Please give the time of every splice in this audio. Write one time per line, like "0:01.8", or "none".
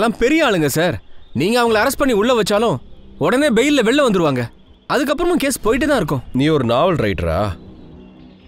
0:06.2